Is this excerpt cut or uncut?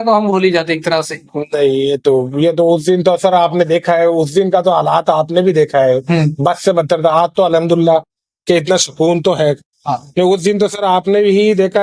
uncut